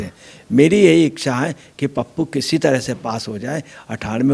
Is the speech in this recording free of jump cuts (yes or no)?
yes